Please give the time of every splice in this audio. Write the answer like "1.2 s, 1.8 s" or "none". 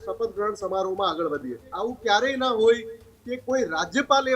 1.7 s

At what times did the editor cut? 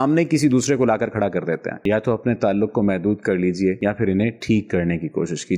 1.8 s

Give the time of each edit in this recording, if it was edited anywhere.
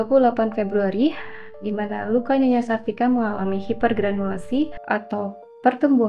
4.8 s

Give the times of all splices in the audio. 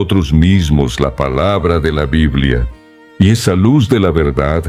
none

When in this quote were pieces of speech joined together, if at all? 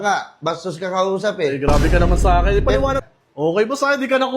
3.0 s

